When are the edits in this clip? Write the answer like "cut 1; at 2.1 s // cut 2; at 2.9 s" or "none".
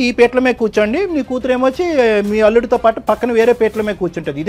none